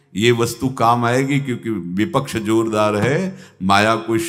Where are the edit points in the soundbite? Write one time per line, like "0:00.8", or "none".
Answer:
none